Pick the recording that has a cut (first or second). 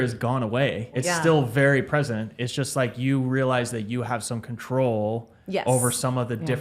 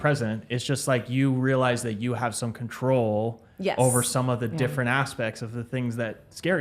first